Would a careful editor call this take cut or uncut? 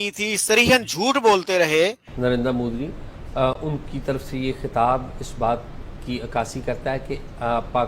cut